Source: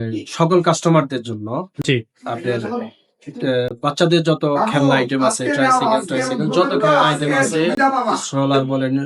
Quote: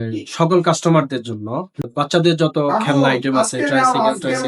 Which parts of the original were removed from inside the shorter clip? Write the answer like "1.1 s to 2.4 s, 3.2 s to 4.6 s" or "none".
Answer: 1.8 s to 3.7 s